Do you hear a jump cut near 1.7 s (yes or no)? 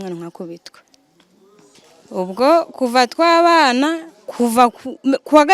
yes